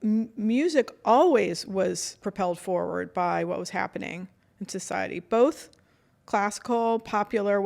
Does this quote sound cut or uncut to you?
cut